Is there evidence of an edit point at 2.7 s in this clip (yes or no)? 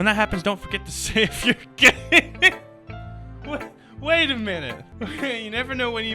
no